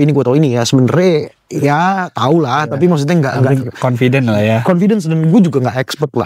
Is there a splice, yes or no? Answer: no